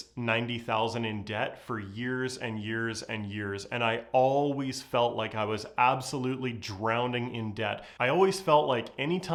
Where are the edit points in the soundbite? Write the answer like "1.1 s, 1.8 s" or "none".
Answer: none